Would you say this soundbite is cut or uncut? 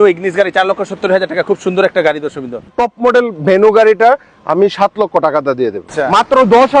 cut